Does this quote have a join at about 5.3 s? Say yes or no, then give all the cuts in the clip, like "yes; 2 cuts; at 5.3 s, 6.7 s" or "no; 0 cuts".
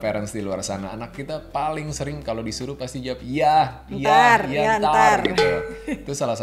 no; 0 cuts